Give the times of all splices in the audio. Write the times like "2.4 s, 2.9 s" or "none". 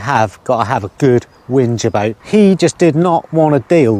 2.2 s

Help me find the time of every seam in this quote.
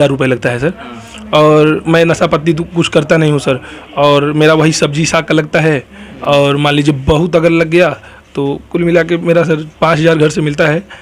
none

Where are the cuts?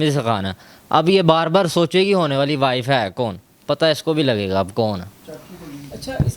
none

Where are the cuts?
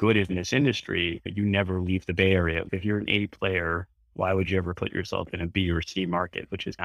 2.7 s

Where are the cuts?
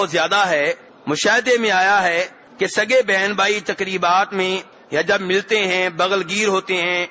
0.9 s, 2.4 s, 4.7 s

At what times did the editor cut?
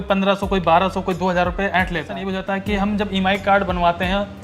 2.2 s

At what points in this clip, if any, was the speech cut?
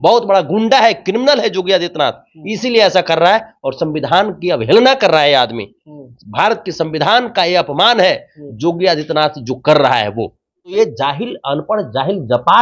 10.7 s

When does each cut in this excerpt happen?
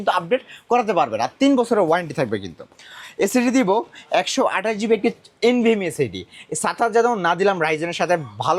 none

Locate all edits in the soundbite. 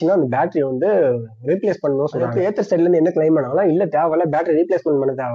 2.3 s

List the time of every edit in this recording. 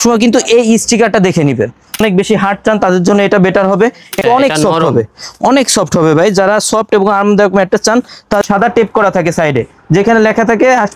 2.0 s, 4.2 s, 8.4 s

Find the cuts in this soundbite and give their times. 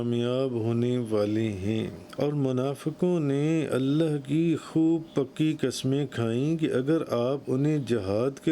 2.1 s

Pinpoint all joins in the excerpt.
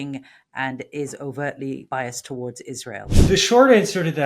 1.8 s, 3.1 s

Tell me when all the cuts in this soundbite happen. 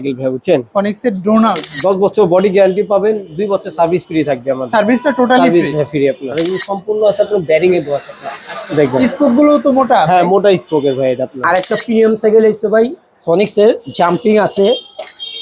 1.7 s, 6.3 s, 11.3 s

